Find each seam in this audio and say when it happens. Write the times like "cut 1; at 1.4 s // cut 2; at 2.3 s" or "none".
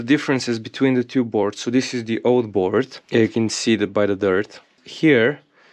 cut 1; at 3.0 s // cut 2; at 4.8 s